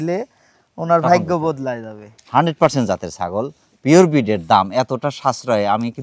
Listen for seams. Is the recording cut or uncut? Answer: cut